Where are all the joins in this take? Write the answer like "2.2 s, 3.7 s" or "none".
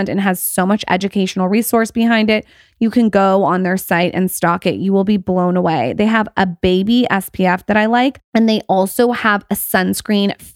none